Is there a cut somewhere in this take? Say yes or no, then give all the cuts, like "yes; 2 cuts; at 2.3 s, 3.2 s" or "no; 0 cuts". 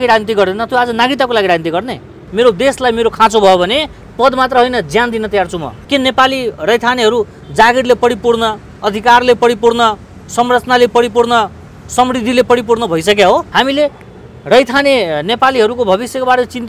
yes; 3 cuts; at 2.2 s, 5.7 s, 13.5 s